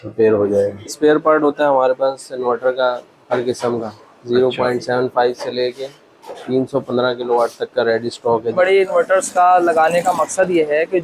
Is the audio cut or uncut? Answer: cut